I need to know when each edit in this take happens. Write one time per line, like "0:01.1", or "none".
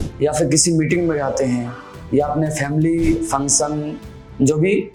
none

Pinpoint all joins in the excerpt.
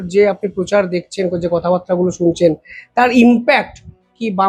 none

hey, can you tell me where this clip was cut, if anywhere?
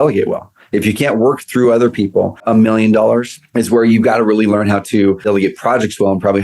0:02.4
0:03.4
0:04.9

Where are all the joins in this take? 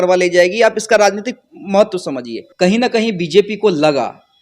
0:02.4

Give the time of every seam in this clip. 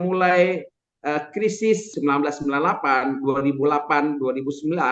0:01.9

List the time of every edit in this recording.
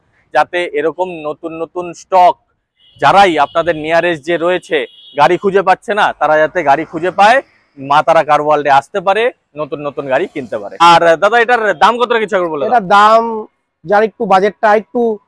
0:10.8

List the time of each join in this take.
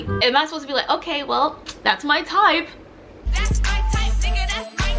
0:03.1

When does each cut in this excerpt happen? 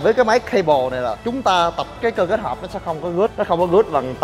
0:01.9
0:03.3

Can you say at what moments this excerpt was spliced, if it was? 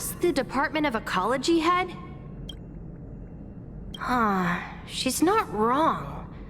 0:01.9
0:04.0

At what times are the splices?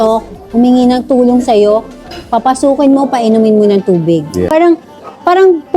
0:04.5

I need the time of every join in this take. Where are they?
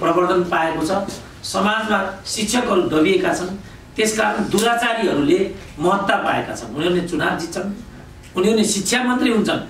none

